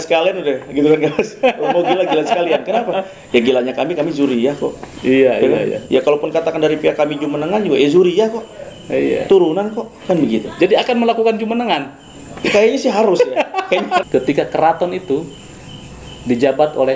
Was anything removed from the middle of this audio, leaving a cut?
yes; 1 cut; at 14.1 s

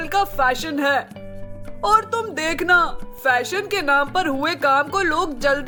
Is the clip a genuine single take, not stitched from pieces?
yes; 0 cuts

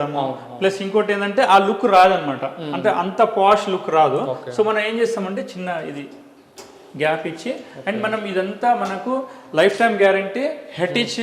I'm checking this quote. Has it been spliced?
no; 0 cuts

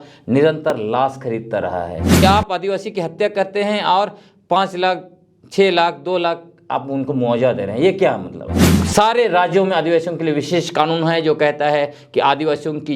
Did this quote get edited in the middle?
yes; 2 cuts; at 2.2 s, 8.7 s

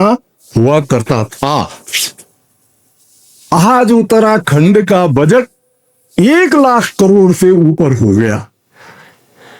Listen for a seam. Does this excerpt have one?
no; 0 cuts

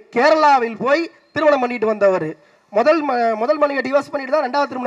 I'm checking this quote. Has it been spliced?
no; 0 cuts

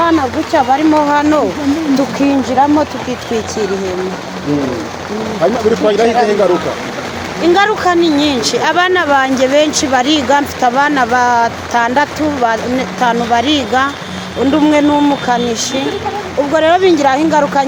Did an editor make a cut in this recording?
no; 0 cuts

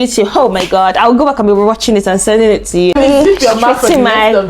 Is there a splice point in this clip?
yes; 1 cut; at 2.9 s

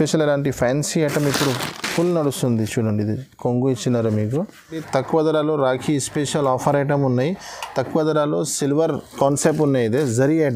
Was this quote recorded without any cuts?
no; 1 cut; at 4.8 s

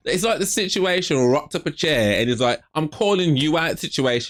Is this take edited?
no; 0 cuts

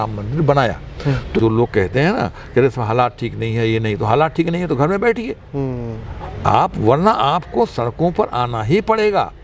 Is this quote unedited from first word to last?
no; 1 cut; at 1.4 s

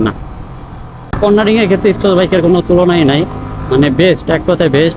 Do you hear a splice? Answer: yes; 1 cut; at 1.1 s

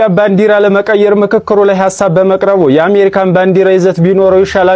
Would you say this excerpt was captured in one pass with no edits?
yes; 0 cuts

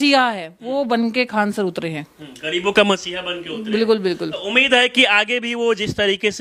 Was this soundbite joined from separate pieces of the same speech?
no; 0 cuts

